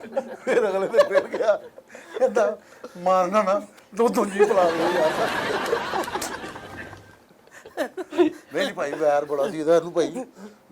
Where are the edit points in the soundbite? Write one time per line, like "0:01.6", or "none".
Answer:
none